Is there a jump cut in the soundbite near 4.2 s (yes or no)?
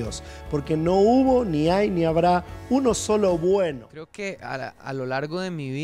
yes